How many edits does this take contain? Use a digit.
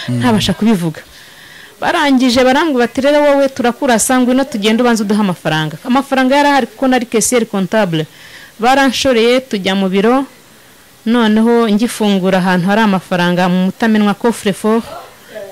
0